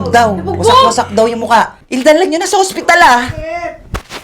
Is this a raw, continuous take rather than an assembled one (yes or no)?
no